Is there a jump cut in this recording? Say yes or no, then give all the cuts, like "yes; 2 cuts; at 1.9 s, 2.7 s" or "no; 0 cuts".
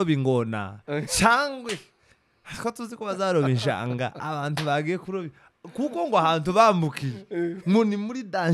no; 0 cuts